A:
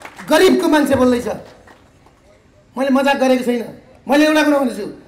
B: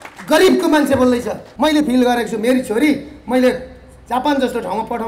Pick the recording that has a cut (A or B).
B